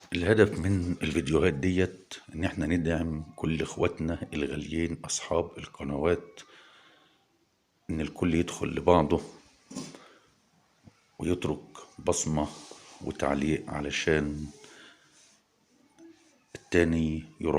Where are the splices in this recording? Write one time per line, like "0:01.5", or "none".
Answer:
0:07.8